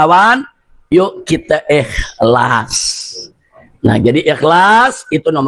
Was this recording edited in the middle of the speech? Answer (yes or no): no